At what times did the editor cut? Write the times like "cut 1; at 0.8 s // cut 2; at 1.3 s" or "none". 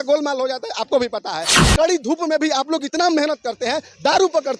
cut 1; at 1.6 s